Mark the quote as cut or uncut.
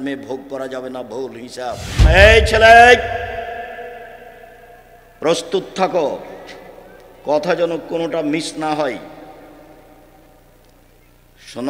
cut